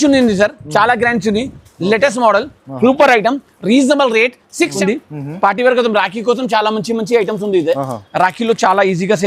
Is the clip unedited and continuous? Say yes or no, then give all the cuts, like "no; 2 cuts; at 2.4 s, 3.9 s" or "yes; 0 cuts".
no; 1 cut; at 4.8 s